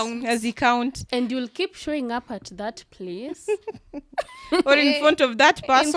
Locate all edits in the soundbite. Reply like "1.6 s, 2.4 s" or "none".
none